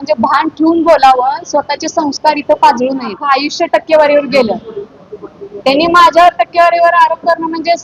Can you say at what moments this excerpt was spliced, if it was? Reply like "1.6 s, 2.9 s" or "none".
3.2 s